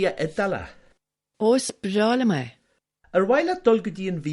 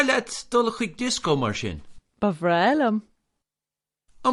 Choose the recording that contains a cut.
first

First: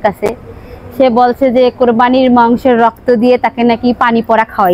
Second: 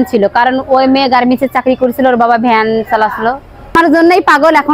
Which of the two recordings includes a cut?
second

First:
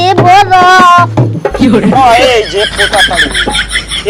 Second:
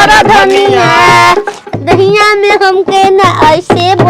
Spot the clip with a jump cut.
second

